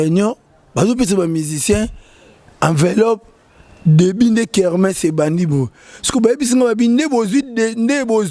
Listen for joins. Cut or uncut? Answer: uncut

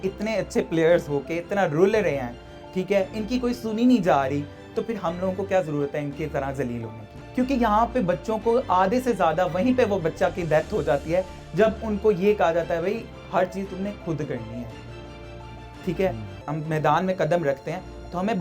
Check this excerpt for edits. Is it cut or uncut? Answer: cut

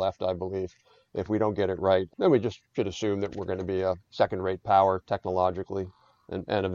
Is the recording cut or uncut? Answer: cut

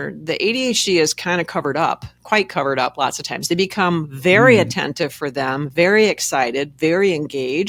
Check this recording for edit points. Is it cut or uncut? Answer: uncut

